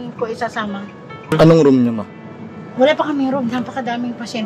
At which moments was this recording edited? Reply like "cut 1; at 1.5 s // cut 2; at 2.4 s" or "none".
cut 1; at 1.3 s

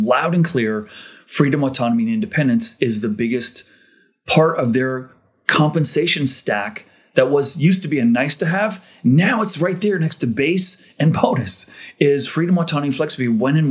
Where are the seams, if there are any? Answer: none

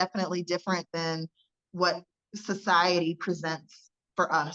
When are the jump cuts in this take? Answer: none

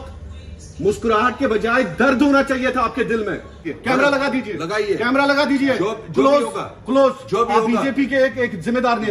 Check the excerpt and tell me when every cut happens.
cut 1; at 3.7 s

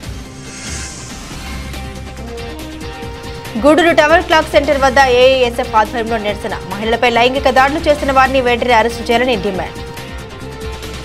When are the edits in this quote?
none

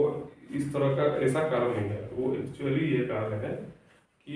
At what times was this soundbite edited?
none

